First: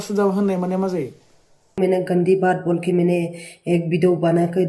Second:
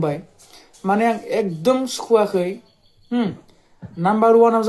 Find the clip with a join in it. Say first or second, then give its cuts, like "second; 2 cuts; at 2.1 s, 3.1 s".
first; 1 cut; at 1.8 s